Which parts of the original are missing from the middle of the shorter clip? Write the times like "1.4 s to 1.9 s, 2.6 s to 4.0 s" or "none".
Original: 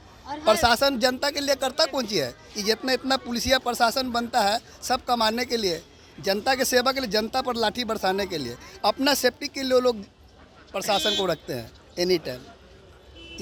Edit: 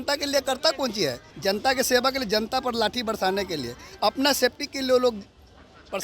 2.4 s to 6.1 s